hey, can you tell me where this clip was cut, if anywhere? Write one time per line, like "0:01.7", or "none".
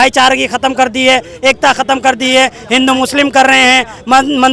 none